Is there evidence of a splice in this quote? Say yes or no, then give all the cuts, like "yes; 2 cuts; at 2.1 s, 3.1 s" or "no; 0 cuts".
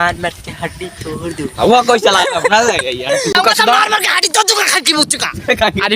yes; 1 cut; at 3.3 s